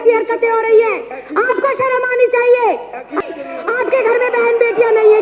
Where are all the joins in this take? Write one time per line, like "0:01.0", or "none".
0:03.1